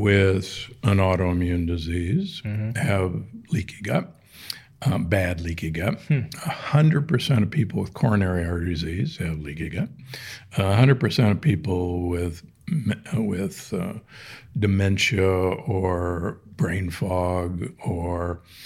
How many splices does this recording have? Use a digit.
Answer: 0